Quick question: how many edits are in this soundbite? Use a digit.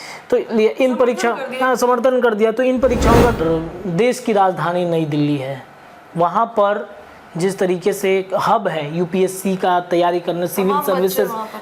1